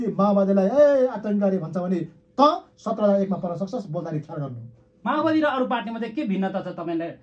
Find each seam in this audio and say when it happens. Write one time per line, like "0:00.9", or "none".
none